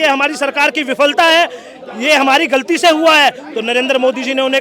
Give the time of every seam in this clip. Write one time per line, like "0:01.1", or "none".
none